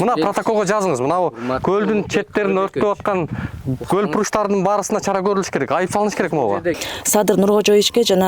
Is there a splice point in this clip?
yes; 1 cut; at 6.8 s

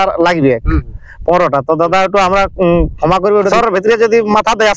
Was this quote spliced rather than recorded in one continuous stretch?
yes; 1 cut; at 3.5 s

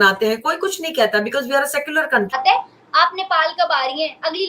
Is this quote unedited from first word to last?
no; 1 cut; at 2.3 s

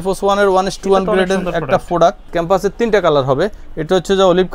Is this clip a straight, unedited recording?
no; 1 cut; at 2.2 s

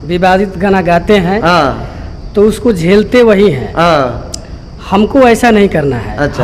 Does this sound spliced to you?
no; 0 cuts

